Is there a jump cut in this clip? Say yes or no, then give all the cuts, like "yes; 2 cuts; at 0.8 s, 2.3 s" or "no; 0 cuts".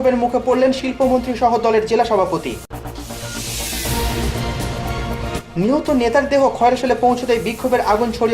yes; 2 cuts; at 2.8 s, 5.4 s